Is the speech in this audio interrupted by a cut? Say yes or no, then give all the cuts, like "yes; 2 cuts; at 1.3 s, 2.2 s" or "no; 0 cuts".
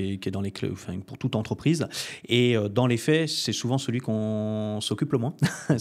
no; 0 cuts